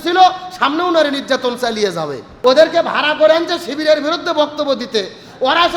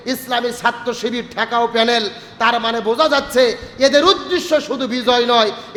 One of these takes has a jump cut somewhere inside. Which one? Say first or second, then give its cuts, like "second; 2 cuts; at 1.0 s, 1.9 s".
first; 1 cut; at 2.2 s